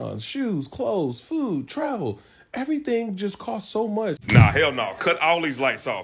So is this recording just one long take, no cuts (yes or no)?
no